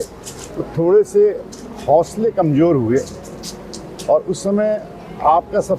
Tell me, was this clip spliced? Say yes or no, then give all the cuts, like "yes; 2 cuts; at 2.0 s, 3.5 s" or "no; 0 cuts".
no; 0 cuts